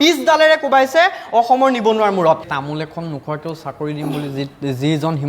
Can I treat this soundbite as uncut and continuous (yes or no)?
no